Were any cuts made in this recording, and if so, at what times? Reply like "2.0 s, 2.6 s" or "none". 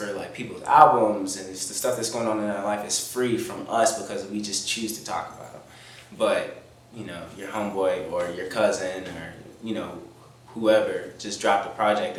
none